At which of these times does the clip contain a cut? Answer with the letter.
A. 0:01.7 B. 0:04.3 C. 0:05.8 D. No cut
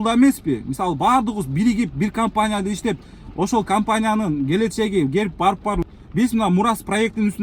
C